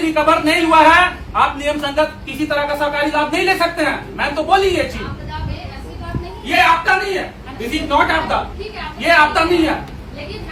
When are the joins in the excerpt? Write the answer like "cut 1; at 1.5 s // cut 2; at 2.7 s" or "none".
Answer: none